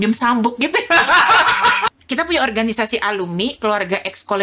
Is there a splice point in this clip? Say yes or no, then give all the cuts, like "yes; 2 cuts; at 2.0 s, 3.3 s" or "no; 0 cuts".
yes; 1 cut; at 1.9 s